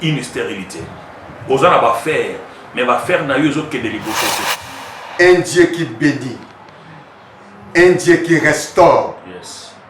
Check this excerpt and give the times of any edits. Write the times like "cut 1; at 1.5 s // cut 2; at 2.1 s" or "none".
cut 1; at 4.5 s